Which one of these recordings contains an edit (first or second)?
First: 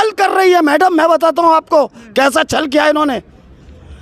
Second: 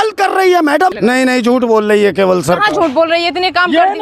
second